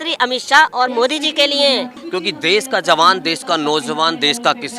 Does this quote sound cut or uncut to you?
cut